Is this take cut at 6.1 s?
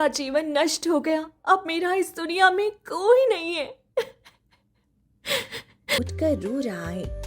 yes; 1 cut; at 6.1 s

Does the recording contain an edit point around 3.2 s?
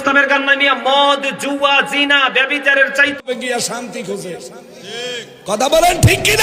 yes; 1 cut; at 3.2 s

